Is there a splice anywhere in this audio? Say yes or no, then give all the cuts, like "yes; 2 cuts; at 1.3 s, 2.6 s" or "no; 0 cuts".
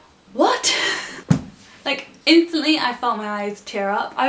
no; 0 cuts